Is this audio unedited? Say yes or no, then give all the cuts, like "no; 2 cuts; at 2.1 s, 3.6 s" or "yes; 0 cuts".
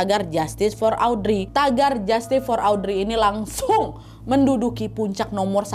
no; 1 cut; at 1.4 s